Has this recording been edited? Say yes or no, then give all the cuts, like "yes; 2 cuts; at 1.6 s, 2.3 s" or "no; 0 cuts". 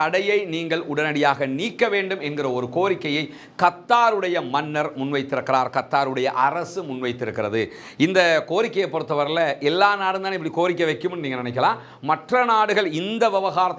no; 0 cuts